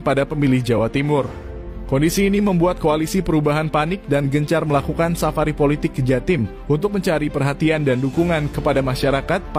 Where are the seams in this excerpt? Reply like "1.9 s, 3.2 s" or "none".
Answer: none